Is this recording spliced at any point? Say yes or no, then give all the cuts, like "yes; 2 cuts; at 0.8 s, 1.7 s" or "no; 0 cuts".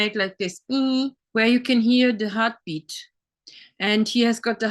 yes; 1 cut; at 1.2 s